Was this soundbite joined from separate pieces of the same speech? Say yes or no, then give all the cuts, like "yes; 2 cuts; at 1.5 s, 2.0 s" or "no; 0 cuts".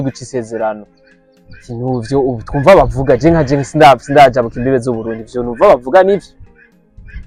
no; 0 cuts